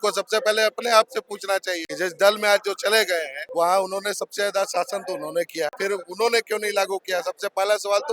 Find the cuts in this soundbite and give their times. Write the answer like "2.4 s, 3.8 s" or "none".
1.9 s, 3.4 s, 5.7 s